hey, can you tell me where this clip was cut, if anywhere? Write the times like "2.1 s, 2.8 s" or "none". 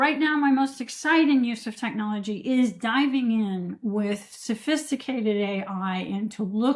none